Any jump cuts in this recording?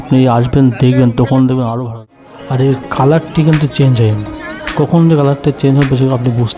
yes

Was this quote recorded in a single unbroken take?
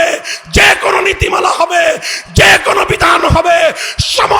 yes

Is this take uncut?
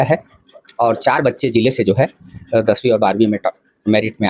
yes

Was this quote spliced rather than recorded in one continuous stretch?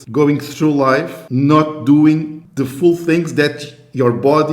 yes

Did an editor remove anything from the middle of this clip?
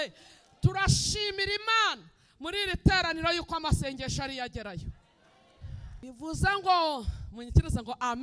yes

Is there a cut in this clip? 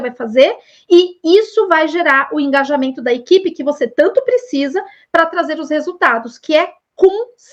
no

